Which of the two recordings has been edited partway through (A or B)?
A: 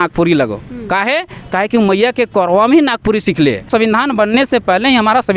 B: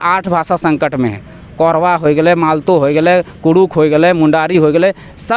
A